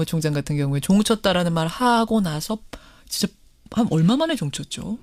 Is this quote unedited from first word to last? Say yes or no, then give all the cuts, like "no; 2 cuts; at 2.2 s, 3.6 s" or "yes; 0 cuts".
yes; 0 cuts